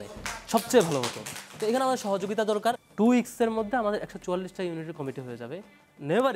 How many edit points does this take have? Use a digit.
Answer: 1